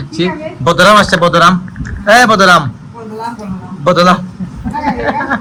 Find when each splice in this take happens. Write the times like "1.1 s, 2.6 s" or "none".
none